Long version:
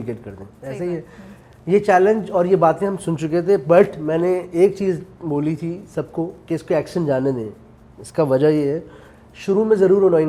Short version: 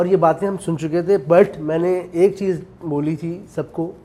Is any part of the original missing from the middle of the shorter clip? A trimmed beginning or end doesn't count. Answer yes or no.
no